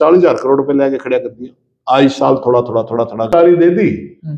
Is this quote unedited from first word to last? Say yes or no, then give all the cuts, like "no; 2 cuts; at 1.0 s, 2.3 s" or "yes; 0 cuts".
no; 1 cut; at 3.3 s